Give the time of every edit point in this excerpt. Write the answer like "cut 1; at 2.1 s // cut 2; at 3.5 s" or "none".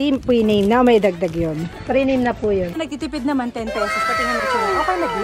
cut 1; at 2.8 s